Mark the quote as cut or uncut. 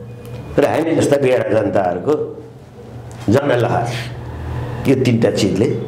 uncut